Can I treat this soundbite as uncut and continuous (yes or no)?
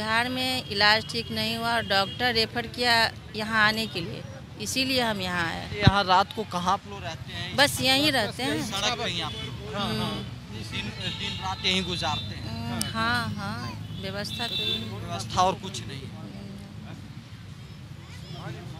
yes